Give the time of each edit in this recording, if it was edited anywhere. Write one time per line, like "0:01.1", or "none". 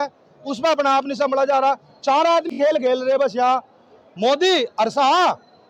none